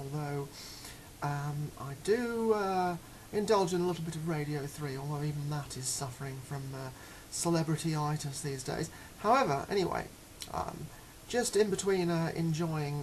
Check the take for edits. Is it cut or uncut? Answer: cut